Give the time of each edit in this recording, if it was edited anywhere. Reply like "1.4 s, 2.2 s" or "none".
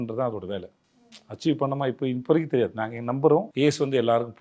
3.5 s